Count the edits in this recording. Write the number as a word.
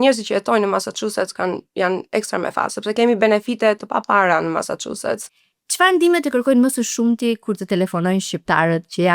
one